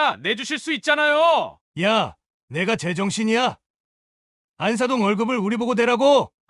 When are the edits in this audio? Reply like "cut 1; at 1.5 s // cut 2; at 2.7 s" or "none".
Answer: cut 1; at 1.6 s